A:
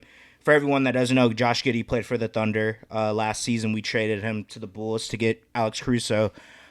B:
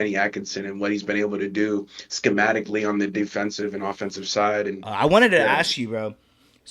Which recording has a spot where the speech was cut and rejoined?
B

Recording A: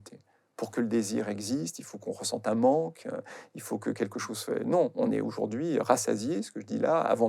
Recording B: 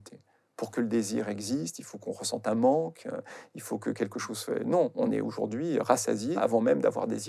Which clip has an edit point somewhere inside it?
B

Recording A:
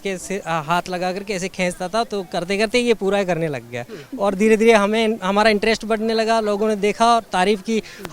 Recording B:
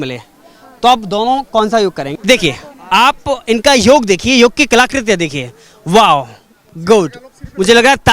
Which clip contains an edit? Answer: B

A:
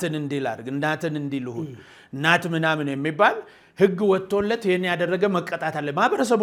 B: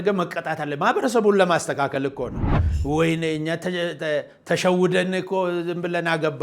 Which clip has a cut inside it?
B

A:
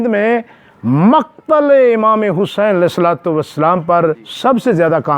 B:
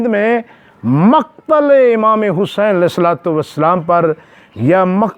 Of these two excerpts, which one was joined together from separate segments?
A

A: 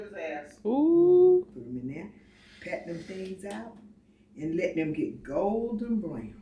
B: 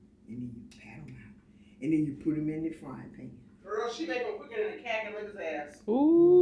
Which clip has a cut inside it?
B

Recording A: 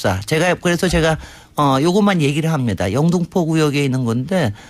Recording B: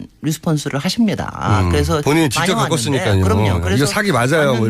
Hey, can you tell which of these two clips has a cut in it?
B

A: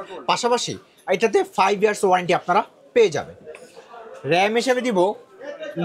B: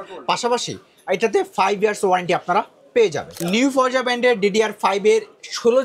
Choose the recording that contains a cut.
B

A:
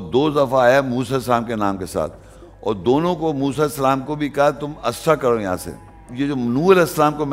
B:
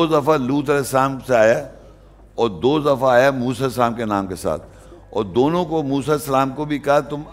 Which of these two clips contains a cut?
A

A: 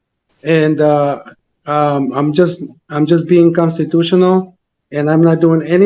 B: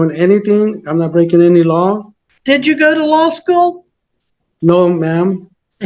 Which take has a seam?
B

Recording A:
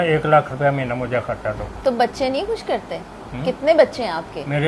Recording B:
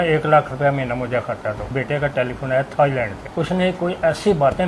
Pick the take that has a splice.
B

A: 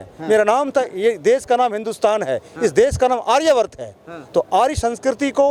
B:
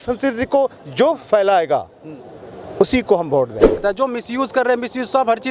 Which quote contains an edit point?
B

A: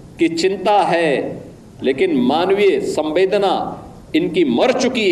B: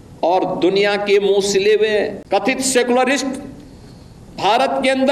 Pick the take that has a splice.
B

